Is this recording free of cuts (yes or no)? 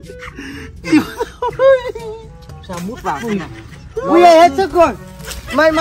yes